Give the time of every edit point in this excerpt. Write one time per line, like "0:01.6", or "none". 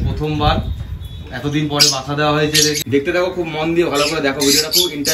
0:02.8